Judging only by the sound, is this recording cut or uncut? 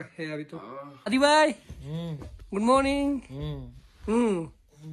cut